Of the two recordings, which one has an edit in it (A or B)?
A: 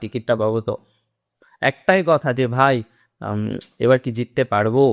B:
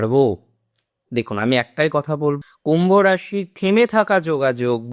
B